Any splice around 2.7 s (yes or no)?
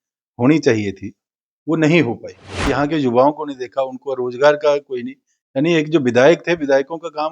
yes